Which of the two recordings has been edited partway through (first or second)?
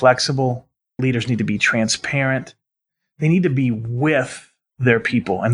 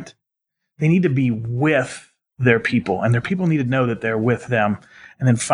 first